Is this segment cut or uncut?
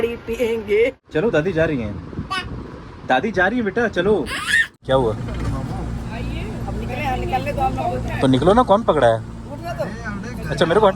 cut